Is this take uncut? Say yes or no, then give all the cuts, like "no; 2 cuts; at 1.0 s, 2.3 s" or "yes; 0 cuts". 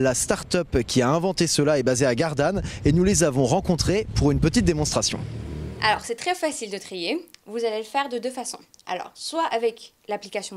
no; 1 cut; at 4.3 s